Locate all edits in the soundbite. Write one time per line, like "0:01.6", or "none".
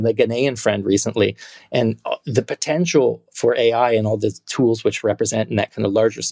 none